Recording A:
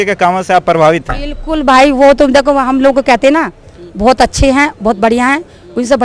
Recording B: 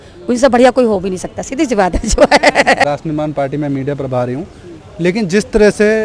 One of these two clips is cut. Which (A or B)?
B